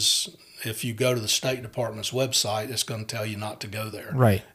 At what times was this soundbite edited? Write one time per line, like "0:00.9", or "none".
none